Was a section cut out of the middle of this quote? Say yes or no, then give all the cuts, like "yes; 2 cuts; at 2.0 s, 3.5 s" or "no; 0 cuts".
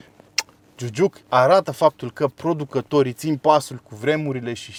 no; 0 cuts